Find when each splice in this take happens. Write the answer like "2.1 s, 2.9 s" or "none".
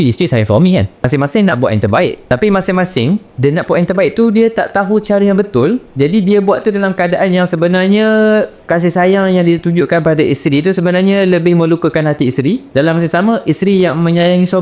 1.0 s, 2.2 s, 3.3 s, 5.9 s, 8.6 s, 12.6 s